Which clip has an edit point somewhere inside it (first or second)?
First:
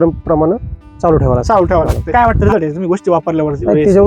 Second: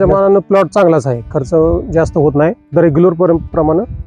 first